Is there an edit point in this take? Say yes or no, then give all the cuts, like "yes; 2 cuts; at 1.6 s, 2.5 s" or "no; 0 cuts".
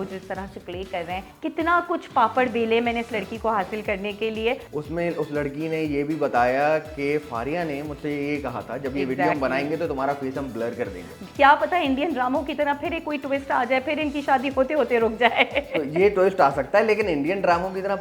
yes; 3 cuts; at 1.3 s, 4.7 s, 11.2 s